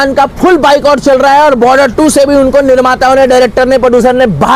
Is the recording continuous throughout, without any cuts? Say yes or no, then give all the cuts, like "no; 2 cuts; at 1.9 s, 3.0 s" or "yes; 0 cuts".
yes; 0 cuts